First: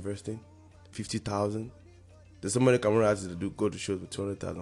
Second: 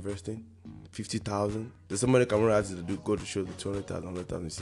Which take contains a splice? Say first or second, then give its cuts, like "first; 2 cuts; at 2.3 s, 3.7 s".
second; 1 cut; at 1.8 s